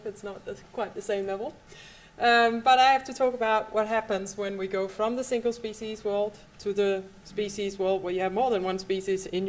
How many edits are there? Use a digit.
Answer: 0